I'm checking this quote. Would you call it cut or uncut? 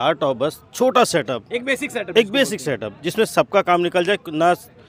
uncut